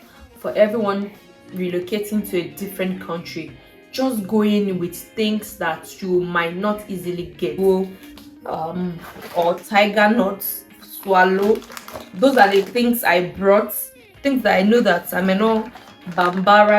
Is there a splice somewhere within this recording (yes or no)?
yes